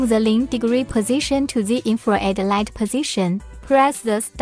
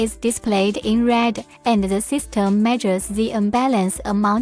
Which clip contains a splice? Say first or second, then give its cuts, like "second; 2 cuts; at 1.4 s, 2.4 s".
first; 1 cut; at 3.5 s